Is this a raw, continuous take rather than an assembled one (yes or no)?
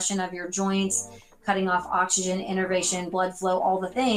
yes